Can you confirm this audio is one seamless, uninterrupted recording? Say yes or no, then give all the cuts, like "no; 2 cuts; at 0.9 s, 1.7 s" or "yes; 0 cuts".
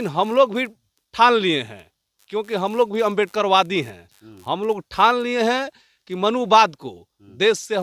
yes; 0 cuts